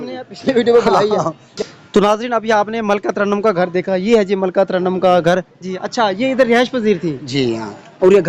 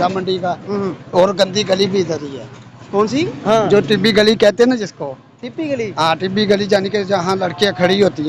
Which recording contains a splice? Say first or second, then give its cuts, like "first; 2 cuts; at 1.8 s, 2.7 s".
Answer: first; 1 cut; at 1.4 s